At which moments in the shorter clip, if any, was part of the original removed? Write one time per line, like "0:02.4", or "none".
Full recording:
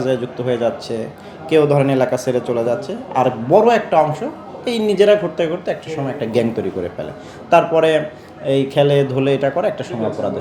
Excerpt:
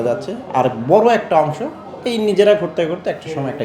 none